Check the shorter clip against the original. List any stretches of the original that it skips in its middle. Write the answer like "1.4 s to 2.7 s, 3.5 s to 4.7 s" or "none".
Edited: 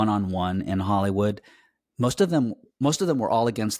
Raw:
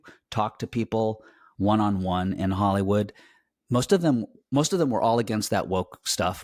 none